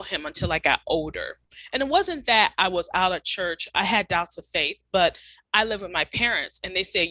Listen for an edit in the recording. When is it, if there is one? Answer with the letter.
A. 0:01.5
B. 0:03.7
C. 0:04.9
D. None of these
D